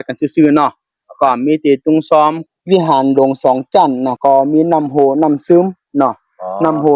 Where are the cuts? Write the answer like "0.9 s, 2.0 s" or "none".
2.4 s, 4.1 s